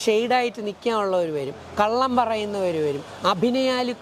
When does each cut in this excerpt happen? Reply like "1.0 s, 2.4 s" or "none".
none